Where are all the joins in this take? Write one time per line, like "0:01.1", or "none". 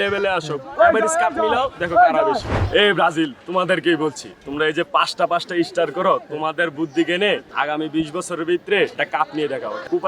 0:02.5
0:07.5
0:09.0